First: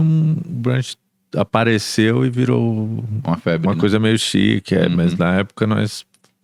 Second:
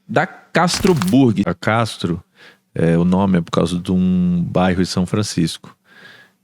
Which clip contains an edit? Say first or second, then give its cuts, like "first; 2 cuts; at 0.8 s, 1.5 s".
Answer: second; 1 cut; at 1.5 s